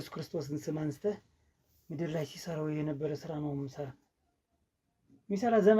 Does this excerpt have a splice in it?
no; 0 cuts

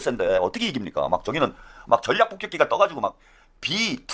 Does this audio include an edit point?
no; 0 cuts

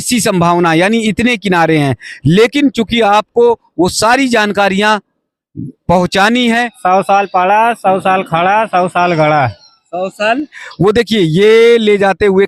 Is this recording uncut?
no; 2 cuts; at 6.7 s, 10.6 s

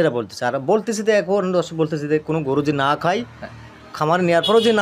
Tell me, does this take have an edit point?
no; 0 cuts

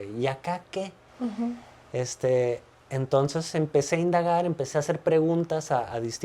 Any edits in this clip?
no; 0 cuts

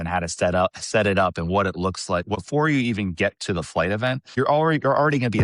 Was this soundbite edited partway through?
yes; 2 cuts; at 2.4 s, 4.3 s

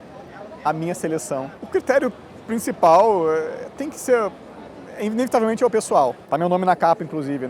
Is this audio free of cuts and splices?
no; 2 cuts; at 1.6 s, 6.2 s

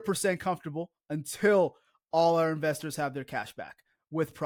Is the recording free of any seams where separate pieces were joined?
yes; 0 cuts

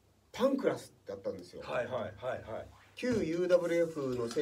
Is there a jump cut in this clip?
no; 0 cuts

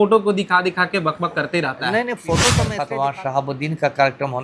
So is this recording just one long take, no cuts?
no; 1 cut; at 2.7 s

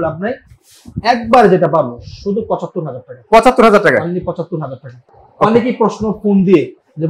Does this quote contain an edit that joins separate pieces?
no; 0 cuts

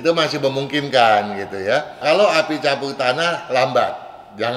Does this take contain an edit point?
yes; 1 cut; at 2.0 s

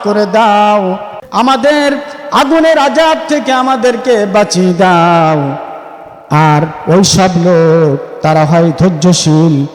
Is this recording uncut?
no; 1 cut; at 1.2 s

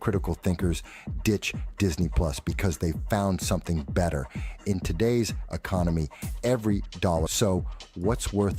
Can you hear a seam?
yes; 1 cut; at 7.3 s

